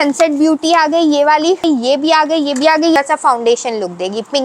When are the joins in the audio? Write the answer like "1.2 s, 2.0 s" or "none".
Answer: 1.6 s, 3.0 s